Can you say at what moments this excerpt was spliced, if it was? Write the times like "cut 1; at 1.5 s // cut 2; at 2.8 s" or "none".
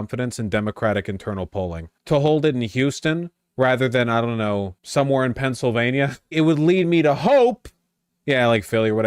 cut 1; at 1.9 s // cut 2; at 4.8 s // cut 3; at 6.3 s